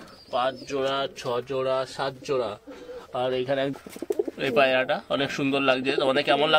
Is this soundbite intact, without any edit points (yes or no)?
no